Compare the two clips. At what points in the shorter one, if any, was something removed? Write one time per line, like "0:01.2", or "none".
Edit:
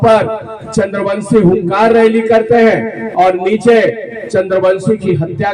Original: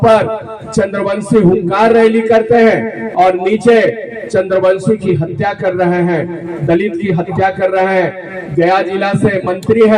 none